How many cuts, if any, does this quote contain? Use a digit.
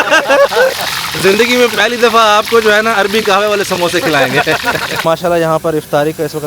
1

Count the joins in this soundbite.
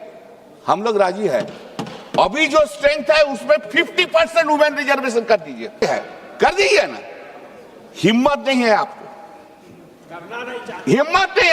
1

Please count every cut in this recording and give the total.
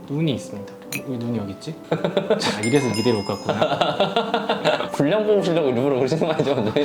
0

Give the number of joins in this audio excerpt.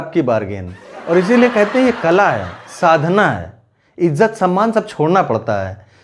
0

